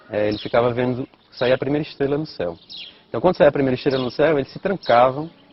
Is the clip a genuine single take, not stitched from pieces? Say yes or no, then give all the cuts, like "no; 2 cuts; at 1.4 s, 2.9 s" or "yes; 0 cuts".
yes; 0 cuts